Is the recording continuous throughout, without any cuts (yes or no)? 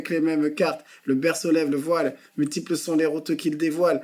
yes